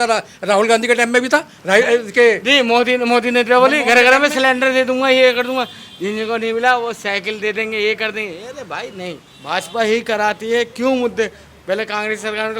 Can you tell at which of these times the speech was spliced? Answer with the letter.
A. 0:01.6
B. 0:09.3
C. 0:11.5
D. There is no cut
B